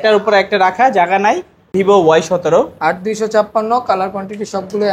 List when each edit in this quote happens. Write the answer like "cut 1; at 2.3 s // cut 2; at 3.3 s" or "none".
cut 1; at 1.6 s